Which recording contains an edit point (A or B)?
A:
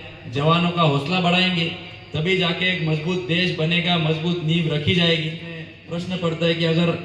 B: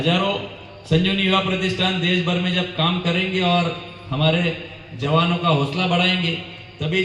A